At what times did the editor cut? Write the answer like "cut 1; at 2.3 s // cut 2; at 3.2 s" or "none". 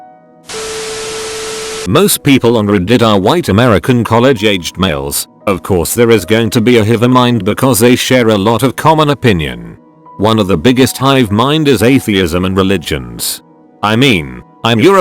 cut 1; at 1.8 s